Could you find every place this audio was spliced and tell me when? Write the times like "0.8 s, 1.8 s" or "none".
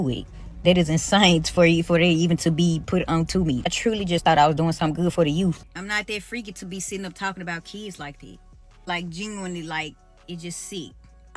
5.6 s